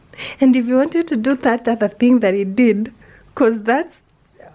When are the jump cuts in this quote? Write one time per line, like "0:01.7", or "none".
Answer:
none